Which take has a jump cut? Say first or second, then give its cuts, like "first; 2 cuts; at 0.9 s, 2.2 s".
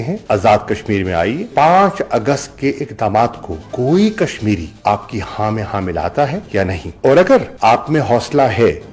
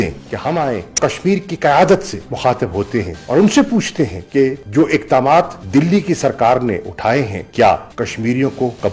first; 2 cuts; at 1.5 s, 4.7 s